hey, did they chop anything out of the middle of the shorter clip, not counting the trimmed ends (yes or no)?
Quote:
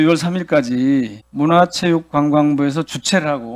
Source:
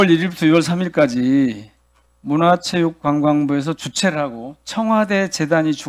yes